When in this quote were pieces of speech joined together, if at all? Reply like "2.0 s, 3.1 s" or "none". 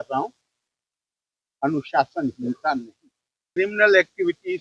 3.6 s